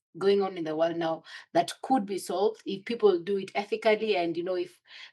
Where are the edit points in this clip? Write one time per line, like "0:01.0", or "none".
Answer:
none